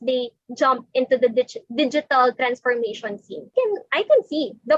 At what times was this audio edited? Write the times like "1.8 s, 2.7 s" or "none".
3.5 s

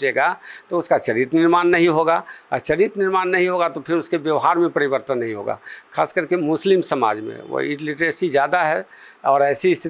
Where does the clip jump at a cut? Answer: none

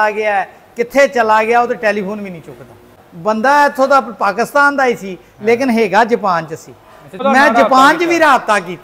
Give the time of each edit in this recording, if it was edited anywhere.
2.9 s, 7.2 s

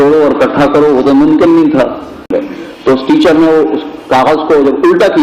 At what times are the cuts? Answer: 2.3 s

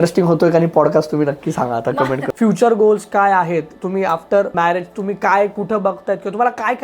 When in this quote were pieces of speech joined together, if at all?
2.4 s, 4.5 s

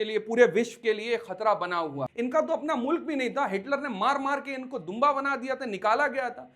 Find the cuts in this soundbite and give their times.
2.0 s

